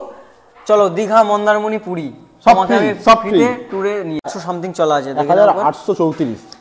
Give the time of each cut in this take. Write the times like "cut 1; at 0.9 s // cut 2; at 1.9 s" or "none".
cut 1; at 4.3 s